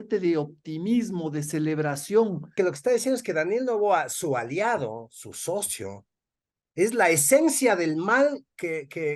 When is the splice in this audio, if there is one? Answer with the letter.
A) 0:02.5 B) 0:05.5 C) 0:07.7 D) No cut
A